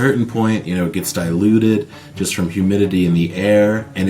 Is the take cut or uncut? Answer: uncut